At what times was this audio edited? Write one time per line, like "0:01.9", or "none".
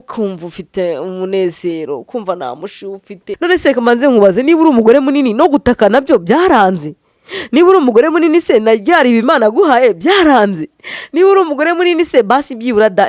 0:03.3